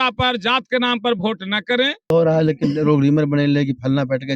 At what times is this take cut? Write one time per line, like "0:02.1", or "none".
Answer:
0:02.1

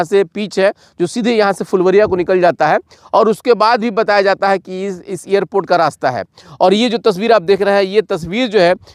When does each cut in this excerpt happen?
none

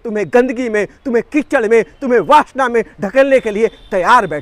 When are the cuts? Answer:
none

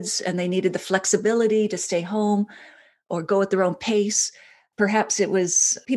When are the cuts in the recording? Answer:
none

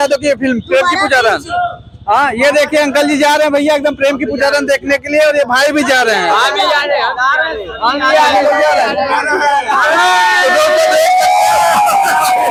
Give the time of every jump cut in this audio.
none

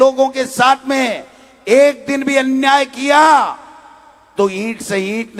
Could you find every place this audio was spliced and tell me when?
none

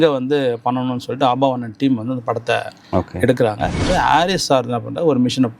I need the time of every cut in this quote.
0:03.8

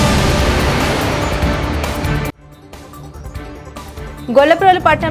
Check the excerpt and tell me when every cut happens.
0:03.3

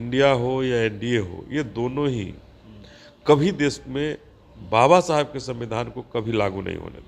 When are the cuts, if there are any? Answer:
none

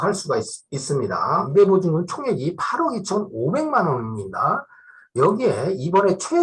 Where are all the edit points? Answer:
0:01.5

